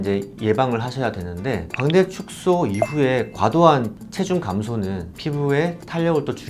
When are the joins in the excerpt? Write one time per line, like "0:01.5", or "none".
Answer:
0:01.7